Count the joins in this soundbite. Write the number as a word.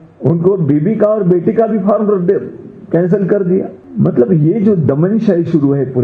one